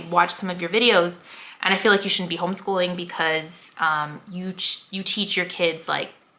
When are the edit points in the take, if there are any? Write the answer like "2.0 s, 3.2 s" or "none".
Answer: none